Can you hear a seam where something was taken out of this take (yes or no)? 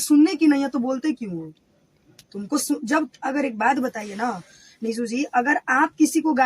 no